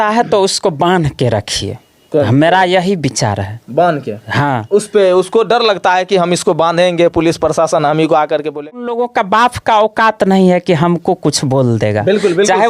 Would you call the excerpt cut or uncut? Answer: cut